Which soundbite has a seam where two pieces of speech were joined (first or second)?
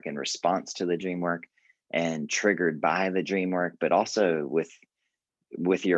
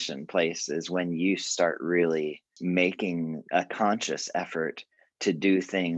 second